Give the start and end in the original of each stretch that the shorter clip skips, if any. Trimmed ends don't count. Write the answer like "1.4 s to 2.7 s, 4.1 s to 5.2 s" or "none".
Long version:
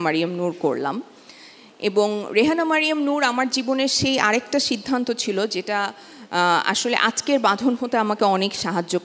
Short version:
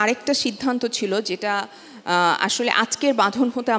none